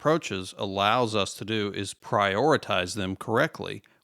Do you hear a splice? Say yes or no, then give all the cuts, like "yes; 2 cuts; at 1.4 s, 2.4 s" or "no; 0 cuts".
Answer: yes; 1 cut; at 1.9 s